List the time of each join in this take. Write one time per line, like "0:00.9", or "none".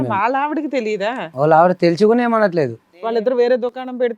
0:03.2